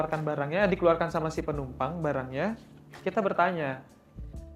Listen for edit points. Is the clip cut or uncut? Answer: uncut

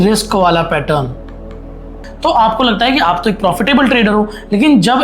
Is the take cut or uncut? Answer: cut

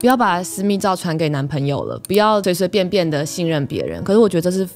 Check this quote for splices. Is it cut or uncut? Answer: uncut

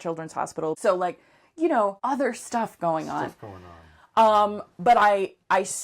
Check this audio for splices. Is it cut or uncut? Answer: cut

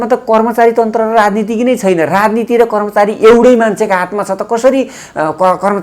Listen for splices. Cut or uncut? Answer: uncut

